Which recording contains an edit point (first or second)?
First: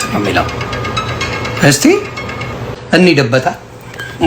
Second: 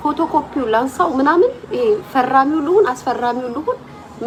first